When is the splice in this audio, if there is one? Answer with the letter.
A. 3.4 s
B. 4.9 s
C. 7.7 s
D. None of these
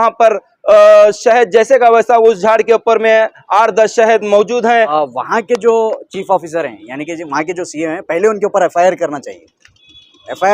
B